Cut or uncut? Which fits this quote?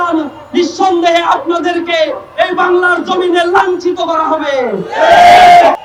uncut